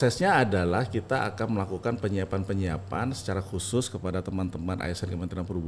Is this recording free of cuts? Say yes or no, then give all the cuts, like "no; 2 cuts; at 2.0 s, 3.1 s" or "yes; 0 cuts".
yes; 0 cuts